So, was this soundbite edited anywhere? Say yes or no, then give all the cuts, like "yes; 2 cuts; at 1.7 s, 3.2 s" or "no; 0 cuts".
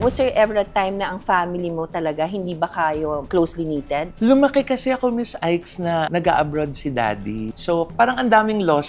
yes; 1 cut; at 7.5 s